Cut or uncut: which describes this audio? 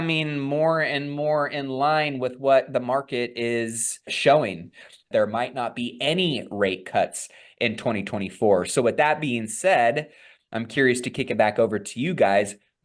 cut